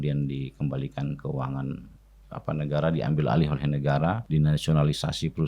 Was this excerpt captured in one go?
no; 1 cut; at 4.2 s

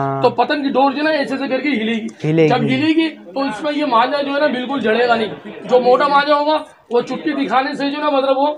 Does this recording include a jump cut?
no; 0 cuts

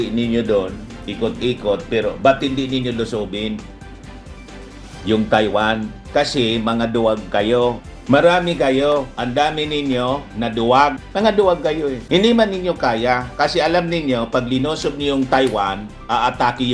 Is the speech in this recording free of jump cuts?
yes; 0 cuts

